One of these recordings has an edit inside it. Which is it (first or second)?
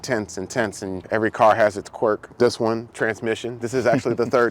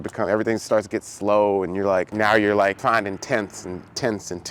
first